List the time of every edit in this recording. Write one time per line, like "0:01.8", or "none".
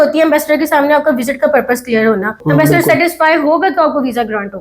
0:02.4